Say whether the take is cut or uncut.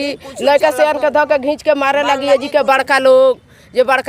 uncut